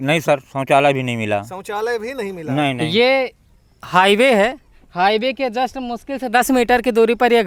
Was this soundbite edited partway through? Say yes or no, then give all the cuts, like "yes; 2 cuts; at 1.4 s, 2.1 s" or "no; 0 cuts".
no; 0 cuts